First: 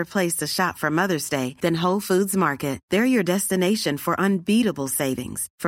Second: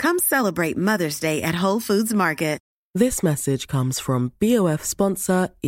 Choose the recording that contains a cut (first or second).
second